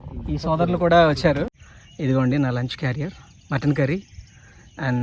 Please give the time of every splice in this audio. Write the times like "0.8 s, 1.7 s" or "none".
1.6 s